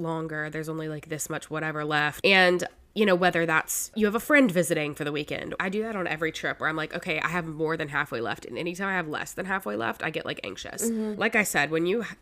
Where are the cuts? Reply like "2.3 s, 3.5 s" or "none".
2.1 s, 3.9 s, 5.2 s, 10.7 s